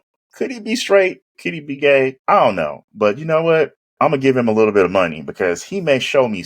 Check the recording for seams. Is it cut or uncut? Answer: cut